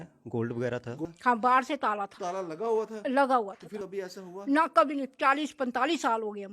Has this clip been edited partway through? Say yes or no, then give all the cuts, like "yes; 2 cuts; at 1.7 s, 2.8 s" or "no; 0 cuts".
yes; 2 cuts; at 1.1 s, 3.8 s